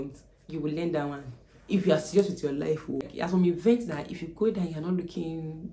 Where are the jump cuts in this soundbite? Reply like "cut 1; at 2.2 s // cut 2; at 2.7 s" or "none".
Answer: cut 1; at 3.1 s